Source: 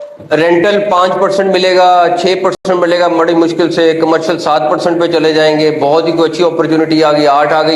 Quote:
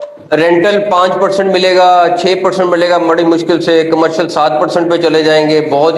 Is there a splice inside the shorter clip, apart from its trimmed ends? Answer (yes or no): yes